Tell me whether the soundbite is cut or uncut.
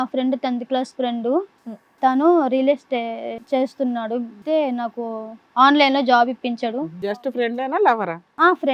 cut